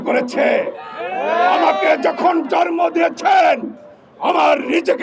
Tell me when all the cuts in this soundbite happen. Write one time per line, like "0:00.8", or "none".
none